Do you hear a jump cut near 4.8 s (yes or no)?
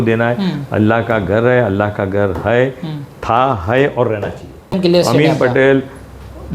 yes